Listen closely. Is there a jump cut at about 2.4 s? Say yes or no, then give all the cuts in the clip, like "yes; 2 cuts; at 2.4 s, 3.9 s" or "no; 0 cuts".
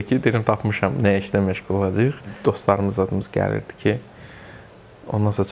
yes; 1 cut; at 2.4 s